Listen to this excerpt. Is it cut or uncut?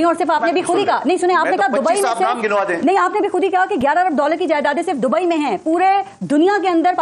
uncut